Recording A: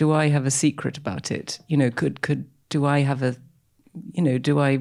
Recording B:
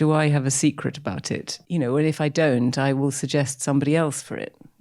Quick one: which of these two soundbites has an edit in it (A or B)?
B